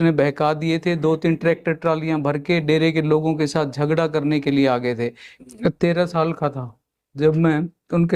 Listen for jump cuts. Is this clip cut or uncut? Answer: cut